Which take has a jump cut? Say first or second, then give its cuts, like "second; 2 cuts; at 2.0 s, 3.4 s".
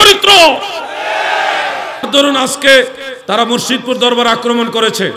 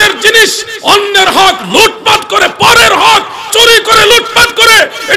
first; 1 cut; at 2.1 s